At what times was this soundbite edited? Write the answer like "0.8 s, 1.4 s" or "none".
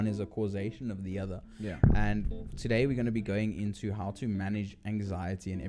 none